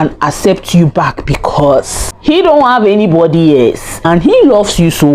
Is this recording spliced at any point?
yes; 2 cuts; at 2.0 s, 4.0 s

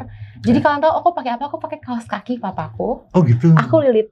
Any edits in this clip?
no; 0 cuts

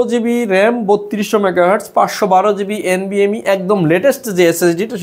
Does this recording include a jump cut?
no; 0 cuts

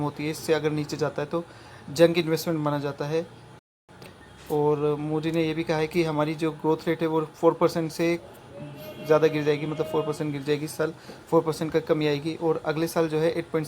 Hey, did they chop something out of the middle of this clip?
yes; 1 cut; at 4.0 s

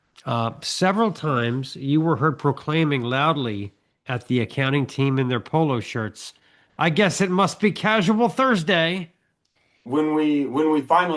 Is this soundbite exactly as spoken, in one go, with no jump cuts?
no; 1 cut; at 9.8 s

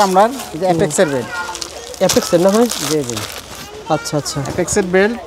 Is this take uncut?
yes; 0 cuts

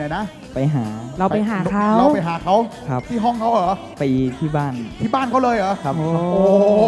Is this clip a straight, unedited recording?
yes; 0 cuts

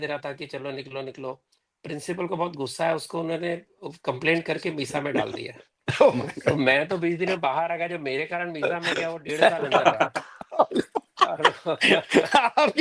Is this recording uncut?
yes; 0 cuts

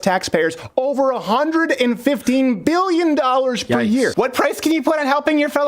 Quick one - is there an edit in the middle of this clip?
yes; 1 cut; at 4.1 s

